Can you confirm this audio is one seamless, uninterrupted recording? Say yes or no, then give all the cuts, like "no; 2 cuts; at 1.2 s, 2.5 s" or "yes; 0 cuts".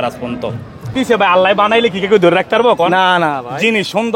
no; 1 cut; at 0.9 s